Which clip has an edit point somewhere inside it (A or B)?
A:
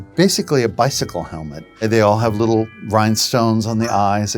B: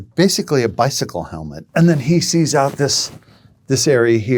A